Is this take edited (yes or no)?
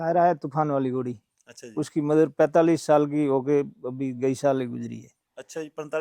no